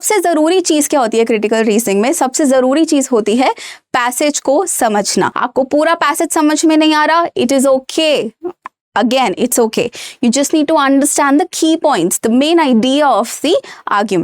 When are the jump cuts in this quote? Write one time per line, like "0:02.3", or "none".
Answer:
0:05.4

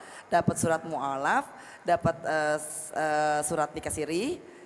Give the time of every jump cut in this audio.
none

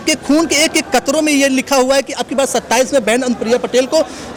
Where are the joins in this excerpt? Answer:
none

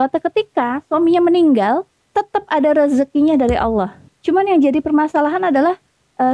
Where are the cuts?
0:02.0
0:04.1

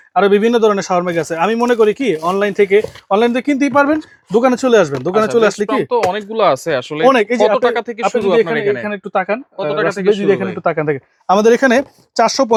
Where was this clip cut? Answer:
none

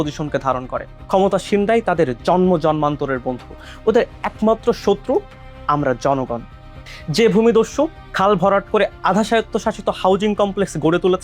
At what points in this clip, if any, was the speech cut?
0:03.6

